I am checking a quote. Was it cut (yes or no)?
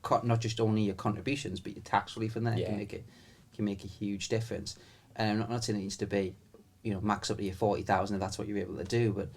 no